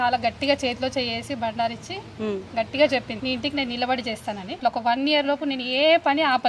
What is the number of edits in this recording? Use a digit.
2